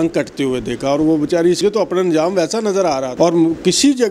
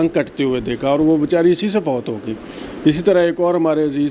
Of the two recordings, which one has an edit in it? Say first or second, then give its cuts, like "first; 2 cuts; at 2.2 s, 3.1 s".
first; 2 cuts; at 1.6 s, 3.1 s